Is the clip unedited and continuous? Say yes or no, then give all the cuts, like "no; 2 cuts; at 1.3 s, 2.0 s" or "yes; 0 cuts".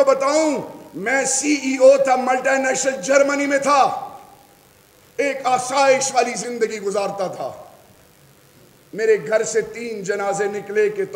yes; 0 cuts